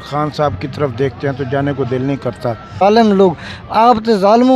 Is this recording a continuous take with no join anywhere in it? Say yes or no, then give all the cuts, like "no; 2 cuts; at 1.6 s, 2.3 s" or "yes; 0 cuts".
no; 1 cut; at 2.8 s